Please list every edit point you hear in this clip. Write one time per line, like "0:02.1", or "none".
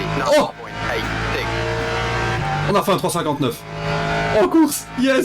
none